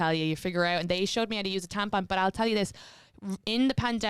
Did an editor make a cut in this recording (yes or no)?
no